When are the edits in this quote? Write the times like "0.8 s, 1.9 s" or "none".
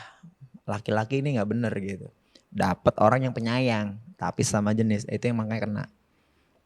none